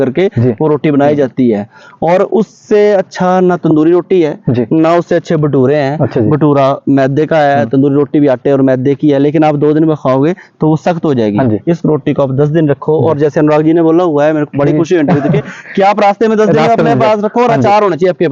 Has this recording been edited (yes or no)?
no